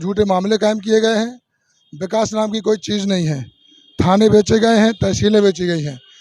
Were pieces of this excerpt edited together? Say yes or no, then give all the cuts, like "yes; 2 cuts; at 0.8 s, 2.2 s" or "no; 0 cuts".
no; 0 cuts